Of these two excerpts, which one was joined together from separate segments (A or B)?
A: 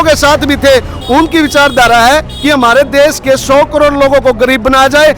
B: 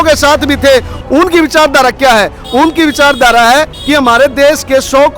A